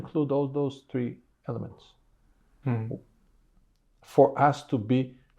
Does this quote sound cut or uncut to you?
cut